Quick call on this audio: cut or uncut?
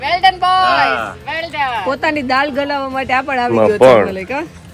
cut